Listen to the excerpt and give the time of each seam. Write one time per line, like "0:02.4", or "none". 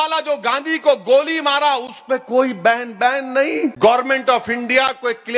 0:03.8